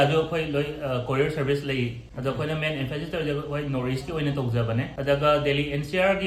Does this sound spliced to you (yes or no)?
no